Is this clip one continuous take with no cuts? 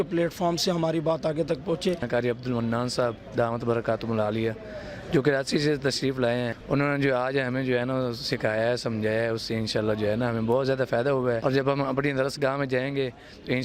no; 3 cuts; at 2.0 s, 6.6 s, 11.4 s

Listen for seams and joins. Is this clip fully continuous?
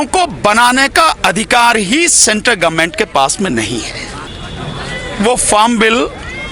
no; 1 cut; at 4.4 s

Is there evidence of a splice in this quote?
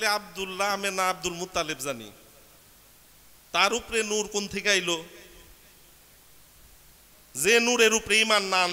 no; 0 cuts

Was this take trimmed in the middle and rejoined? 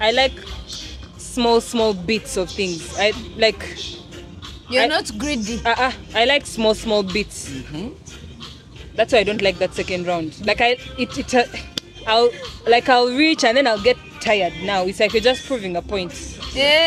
no; 0 cuts

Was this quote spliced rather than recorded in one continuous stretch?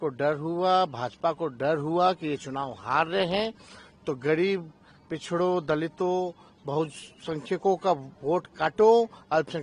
no; 0 cuts

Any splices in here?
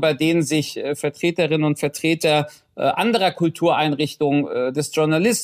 no; 0 cuts

